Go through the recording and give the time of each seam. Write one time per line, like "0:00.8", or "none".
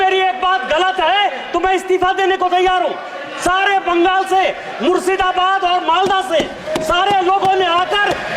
none

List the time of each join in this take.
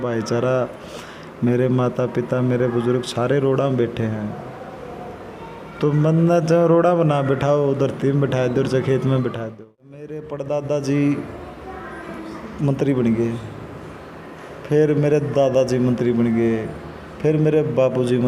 0:10.0

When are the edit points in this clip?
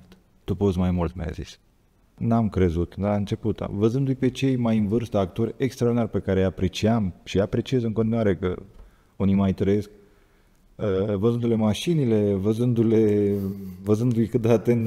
0:02.2

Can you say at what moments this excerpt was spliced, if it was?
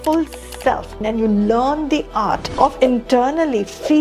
0:01.0
0:02.5

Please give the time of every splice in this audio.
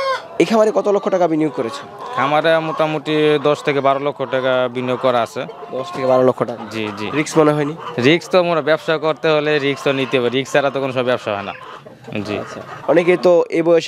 0:12.7

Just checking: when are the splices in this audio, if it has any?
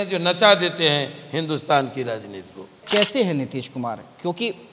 0:02.8

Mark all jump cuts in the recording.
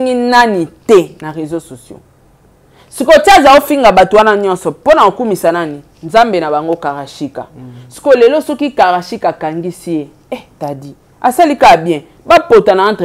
none

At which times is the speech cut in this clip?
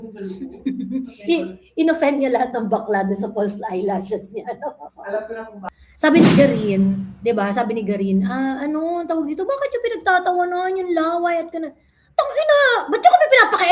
0:05.6

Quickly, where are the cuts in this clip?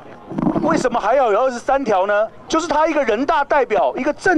0:02.4

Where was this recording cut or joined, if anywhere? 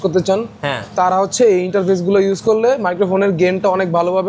none

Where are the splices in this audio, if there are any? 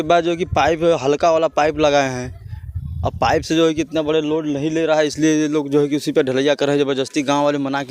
none

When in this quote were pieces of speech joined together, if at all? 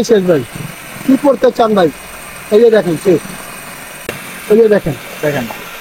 0:04.3

